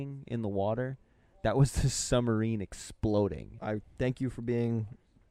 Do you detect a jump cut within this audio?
yes; 1 cut; at 3.5 s

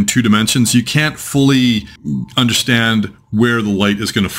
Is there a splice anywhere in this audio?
no; 0 cuts

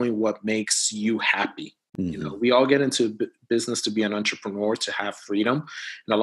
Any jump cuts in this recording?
no; 0 cuts

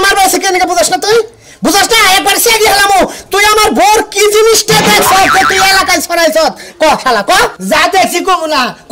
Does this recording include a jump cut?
no; 0 cuts

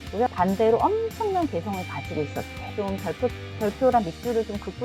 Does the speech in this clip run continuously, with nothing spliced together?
no; 1 cut; at 2.7 s

